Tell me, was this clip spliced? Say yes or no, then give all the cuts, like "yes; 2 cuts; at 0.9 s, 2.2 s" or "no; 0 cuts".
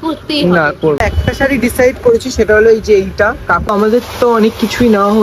yes; 2 cuts; at 1.0 s, 3.7 s